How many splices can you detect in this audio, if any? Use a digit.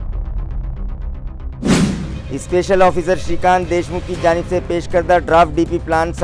1